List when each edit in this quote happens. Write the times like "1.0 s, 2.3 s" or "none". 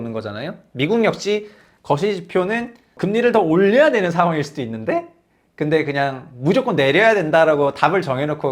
3.0 s